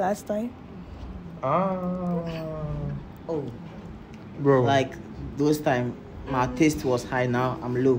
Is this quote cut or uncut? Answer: uncut